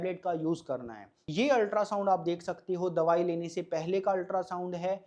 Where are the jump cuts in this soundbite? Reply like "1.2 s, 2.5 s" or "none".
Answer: 1.2 s